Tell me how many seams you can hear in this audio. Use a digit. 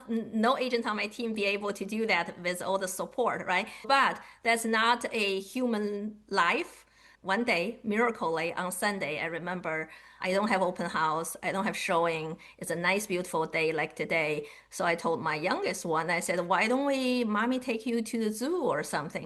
2